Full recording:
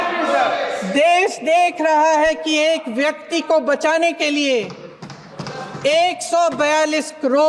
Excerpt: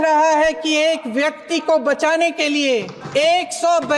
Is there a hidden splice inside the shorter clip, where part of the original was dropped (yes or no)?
yes